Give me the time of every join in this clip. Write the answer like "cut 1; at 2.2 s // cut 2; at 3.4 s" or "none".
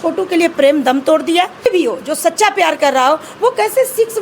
cut 1; at 1.7 s